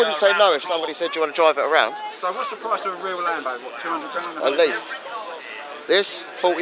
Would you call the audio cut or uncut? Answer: uncut